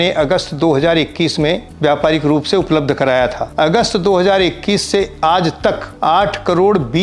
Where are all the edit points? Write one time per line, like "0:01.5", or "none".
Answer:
0:01.7
0:03.4
0:05.9